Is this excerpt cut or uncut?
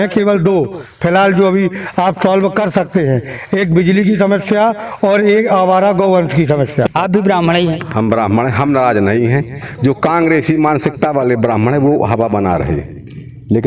cut